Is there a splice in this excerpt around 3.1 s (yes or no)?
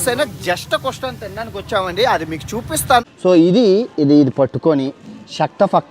yes